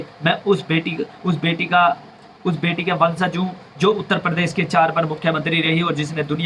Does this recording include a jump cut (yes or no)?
no